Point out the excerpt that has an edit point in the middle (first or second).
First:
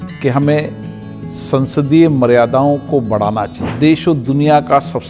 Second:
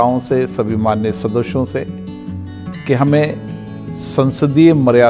first